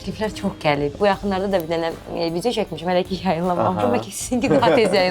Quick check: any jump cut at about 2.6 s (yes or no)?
no